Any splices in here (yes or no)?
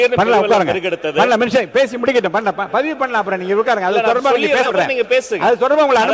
no